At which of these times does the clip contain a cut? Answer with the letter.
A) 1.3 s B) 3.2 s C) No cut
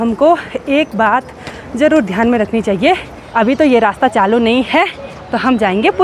B